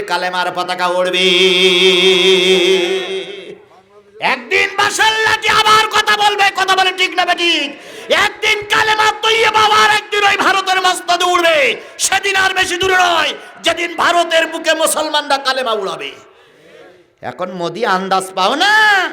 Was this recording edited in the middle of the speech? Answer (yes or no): no